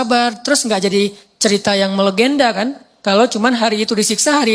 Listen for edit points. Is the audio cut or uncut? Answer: uncut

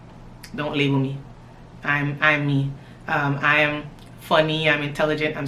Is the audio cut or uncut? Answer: uncut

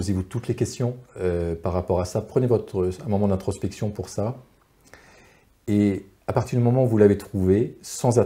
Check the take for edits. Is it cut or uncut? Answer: uncut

